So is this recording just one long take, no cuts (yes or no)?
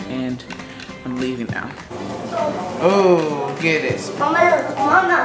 no